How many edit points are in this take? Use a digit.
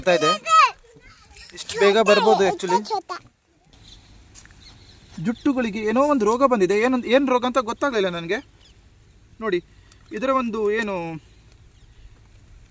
1